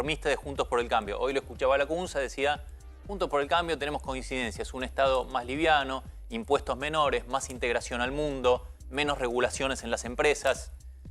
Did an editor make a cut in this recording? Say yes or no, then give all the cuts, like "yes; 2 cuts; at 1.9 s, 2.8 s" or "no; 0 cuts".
no; 0 cuts